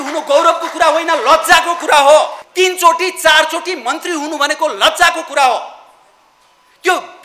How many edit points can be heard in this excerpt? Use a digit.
1